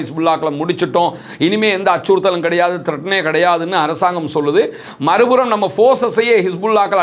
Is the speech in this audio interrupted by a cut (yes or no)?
no